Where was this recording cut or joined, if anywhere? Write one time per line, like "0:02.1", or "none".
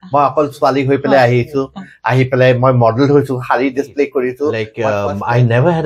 0:04.7